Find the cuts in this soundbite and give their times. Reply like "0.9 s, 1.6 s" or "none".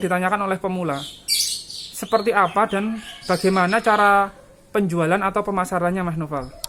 none